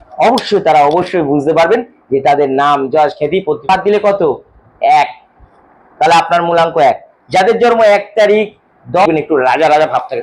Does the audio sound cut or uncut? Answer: cut